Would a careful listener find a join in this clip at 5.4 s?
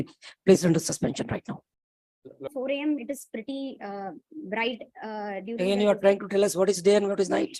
no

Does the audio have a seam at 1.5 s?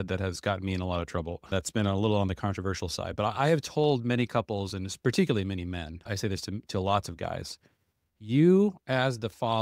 yes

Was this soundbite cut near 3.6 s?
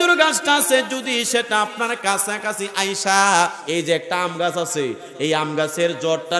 yes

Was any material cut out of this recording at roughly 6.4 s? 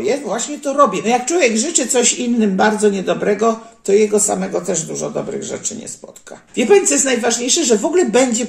yes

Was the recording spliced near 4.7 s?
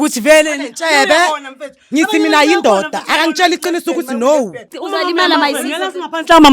yes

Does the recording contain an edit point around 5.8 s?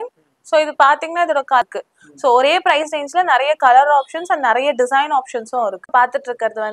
yes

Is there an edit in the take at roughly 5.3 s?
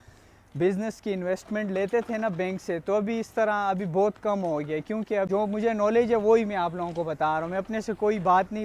yes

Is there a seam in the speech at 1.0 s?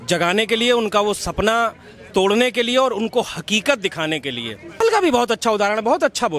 no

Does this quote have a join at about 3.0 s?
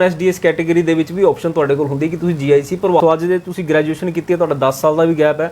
yes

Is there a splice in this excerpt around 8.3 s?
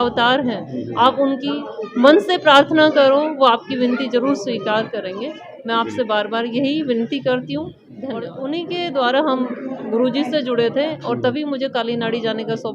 yes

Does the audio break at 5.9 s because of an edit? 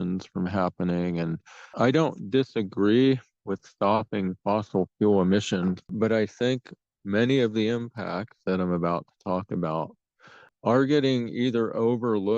yes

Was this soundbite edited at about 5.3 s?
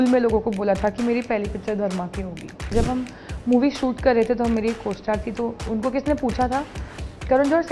no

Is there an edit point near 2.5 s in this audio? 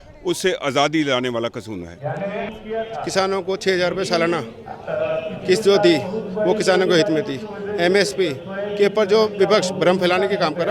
yes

